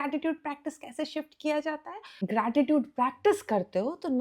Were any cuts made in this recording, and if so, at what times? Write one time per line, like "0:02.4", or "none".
0:02.3